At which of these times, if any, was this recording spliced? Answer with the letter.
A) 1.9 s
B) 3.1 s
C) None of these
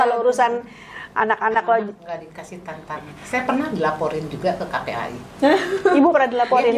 C